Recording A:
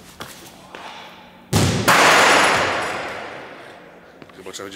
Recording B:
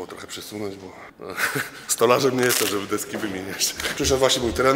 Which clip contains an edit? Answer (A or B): B